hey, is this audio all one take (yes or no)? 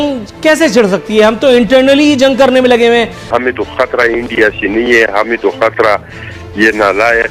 no